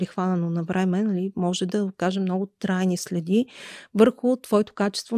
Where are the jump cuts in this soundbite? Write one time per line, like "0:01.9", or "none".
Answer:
none